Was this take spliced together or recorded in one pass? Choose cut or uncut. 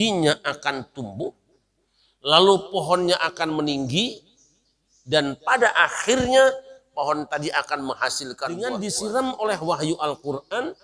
cut